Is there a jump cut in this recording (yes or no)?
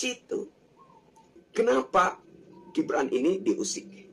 yes